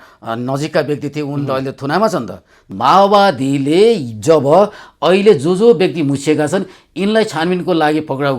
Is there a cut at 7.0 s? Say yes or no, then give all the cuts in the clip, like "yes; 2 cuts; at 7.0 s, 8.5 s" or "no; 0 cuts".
no; 1 cut; at 2.7 s